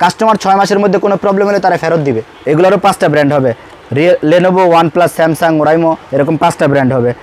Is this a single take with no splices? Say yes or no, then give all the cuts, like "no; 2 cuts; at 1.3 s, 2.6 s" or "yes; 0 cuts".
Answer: no; 1 cut; at 2.3 s